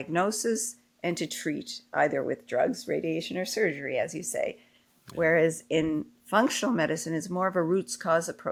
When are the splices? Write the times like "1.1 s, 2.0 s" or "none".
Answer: none